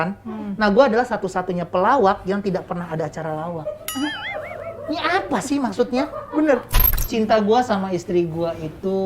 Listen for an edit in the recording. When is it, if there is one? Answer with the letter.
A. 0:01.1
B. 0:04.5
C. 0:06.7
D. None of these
C